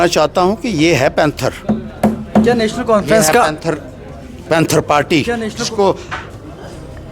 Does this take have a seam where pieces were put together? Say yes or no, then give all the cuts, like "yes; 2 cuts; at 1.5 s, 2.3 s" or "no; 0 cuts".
no; 0 cuts